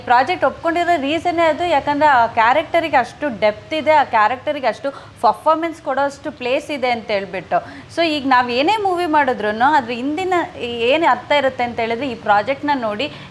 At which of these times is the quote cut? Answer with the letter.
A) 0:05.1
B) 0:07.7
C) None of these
C